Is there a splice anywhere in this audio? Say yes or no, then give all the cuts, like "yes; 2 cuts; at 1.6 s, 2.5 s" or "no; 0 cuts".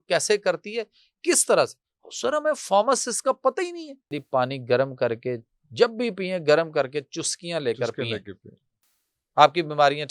yes; 1 cut; at 4.2 s